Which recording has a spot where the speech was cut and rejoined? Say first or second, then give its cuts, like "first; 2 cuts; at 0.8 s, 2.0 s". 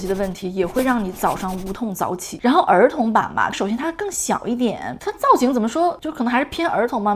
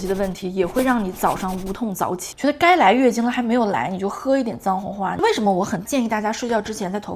second; 2 cuts; at 2.3 s, 5.1 s